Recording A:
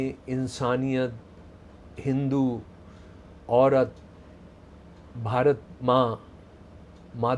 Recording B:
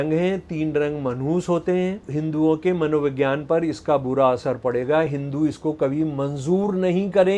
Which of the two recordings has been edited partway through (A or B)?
B